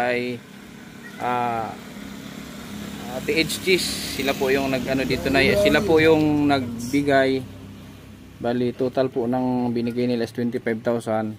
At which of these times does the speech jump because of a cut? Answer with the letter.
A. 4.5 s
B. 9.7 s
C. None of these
C